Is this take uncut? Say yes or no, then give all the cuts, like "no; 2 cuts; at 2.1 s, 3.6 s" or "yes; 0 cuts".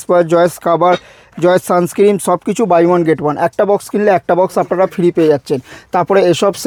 yes; 0 cuts